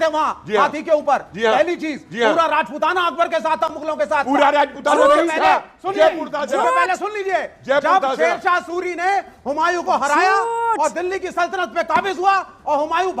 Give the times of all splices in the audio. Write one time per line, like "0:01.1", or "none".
none